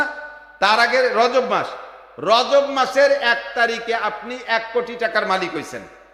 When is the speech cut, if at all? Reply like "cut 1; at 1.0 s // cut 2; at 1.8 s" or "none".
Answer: none